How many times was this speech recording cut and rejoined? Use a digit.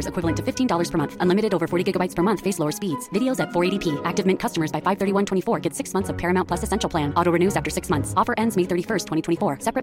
0